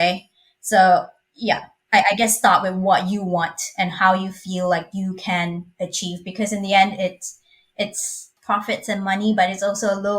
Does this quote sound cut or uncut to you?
cut